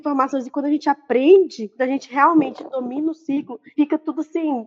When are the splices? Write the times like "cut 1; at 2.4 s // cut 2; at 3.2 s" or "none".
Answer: none